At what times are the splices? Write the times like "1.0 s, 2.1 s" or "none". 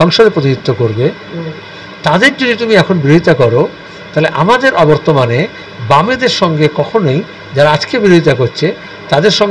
none

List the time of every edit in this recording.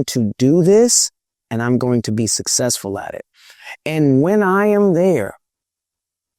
none

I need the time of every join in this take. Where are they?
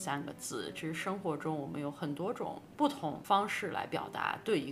3.1 s

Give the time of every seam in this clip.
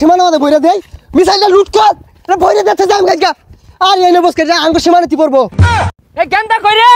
5.9 s

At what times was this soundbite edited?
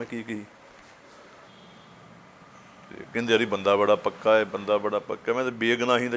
1.5 s

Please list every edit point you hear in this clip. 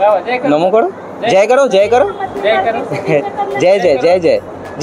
none

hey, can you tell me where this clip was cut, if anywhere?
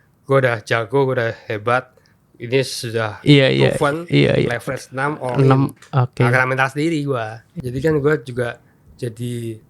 7.5 s

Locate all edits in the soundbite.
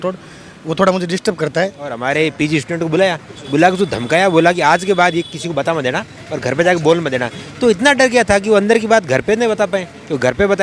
2.0 s

